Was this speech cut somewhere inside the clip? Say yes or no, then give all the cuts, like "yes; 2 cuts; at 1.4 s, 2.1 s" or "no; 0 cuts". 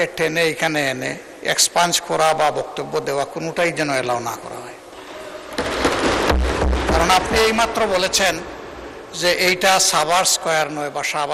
no; 0 cuts